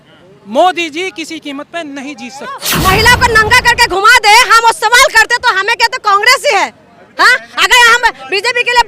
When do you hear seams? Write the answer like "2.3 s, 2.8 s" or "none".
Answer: 2.7 s